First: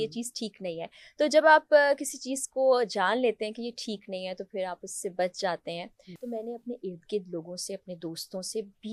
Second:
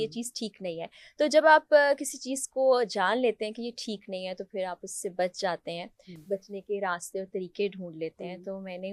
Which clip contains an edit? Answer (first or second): first